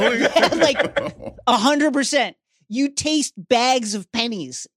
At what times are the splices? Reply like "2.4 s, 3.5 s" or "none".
none